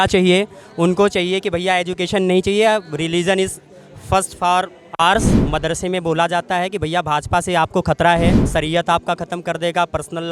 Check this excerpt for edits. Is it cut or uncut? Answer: cut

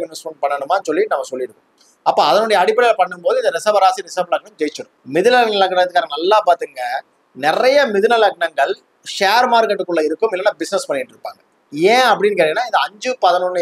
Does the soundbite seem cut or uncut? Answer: cut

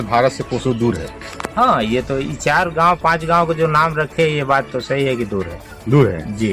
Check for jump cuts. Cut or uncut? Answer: uncut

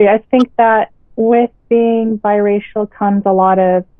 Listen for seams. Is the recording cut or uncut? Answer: uncut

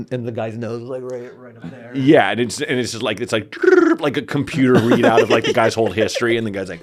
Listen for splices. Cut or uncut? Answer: uncut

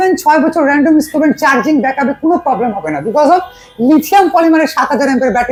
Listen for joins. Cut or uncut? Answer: uncut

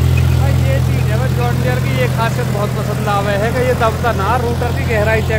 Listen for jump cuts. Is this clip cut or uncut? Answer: uncut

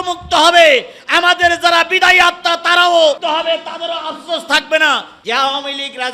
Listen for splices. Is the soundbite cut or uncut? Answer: cut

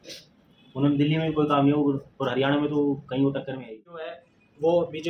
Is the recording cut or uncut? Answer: cut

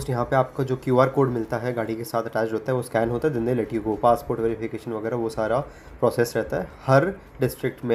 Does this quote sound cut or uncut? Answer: uncut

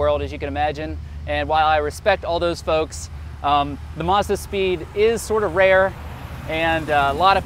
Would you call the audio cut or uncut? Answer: uncut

